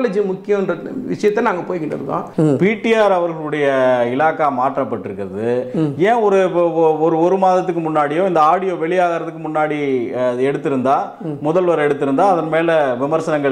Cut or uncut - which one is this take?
cut